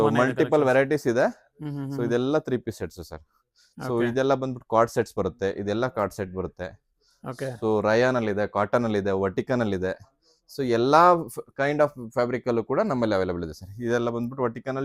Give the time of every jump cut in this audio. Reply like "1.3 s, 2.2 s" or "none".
none